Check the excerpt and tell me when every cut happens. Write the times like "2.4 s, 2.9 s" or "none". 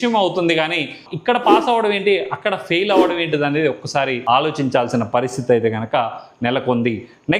none